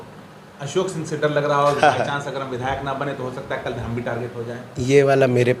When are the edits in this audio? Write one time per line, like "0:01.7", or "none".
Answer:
none